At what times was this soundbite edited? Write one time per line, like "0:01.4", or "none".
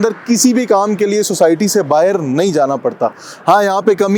none